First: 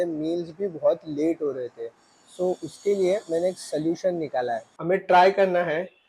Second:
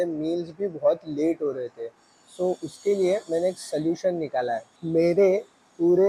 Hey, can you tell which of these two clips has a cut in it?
first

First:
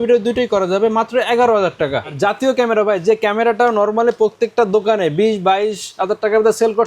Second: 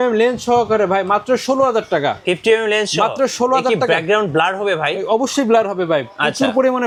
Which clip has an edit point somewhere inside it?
first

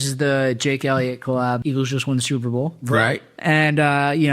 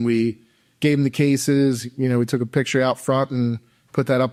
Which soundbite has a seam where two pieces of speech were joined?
first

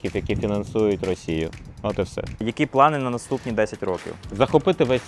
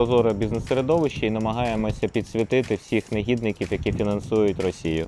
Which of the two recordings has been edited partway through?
first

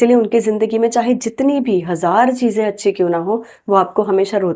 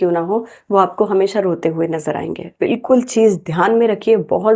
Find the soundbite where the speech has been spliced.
second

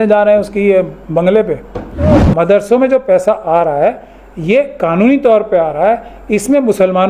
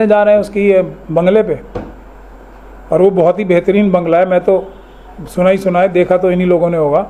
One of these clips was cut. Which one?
first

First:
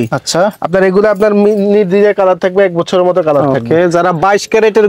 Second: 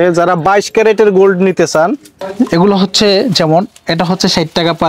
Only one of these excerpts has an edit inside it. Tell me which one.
second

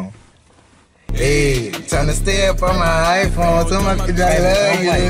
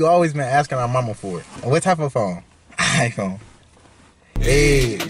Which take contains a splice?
second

